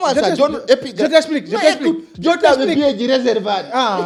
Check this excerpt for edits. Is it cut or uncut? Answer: uncut